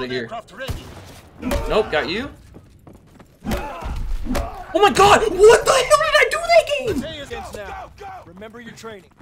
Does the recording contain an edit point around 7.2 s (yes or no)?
yes